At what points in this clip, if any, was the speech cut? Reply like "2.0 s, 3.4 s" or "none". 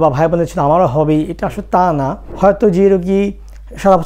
2.2 s